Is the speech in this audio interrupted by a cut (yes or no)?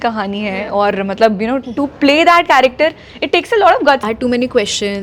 yes